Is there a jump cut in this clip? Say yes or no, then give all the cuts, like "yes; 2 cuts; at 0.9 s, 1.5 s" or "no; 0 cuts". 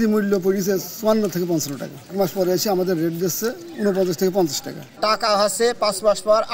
yes; 2 cuts; at 2.1 s, 4.8 s